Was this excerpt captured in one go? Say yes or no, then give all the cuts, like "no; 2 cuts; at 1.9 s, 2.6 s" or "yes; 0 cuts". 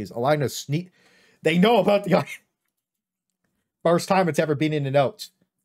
yes; 0 cuts